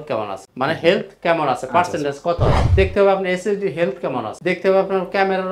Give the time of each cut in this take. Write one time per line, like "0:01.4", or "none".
0:02.6